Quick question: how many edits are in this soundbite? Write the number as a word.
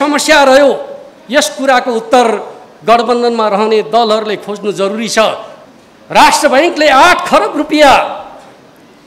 one